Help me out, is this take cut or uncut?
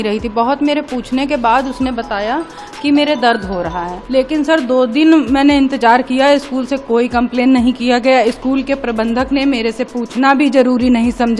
cut